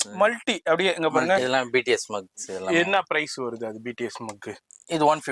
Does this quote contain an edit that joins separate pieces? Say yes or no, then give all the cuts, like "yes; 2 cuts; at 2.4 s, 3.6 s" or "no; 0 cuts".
yes; 1 cut; at 1.4 s